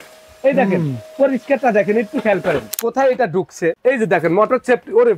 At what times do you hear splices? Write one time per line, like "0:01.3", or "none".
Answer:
0:02.8
0:03.8

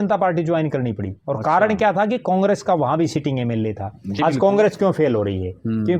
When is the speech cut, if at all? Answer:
0:04.2

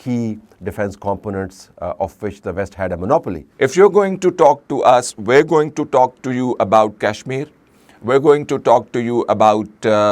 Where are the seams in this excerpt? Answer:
0:03.4

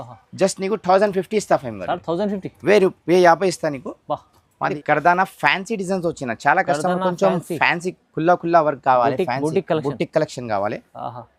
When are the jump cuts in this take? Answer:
0:04.7

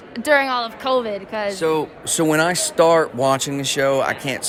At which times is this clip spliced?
none

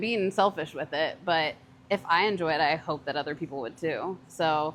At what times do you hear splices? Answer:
none

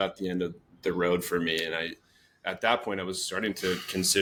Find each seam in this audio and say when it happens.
none

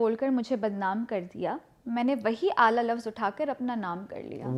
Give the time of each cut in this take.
none

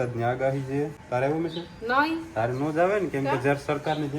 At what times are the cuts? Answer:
0:01.0

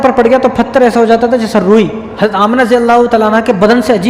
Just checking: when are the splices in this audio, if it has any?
0:02.0

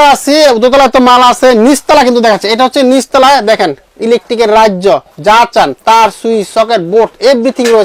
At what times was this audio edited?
none

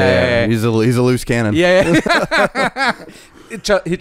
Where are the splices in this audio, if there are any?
0:02.1

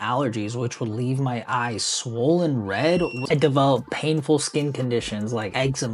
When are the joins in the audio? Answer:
0:03.2

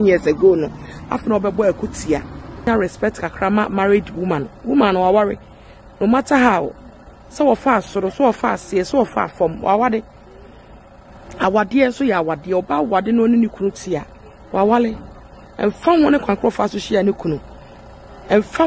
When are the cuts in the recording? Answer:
0:02.7

